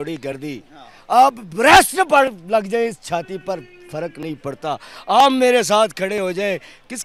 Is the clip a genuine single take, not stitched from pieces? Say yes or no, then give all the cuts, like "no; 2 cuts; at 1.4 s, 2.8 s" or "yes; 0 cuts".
yes; 0 cuts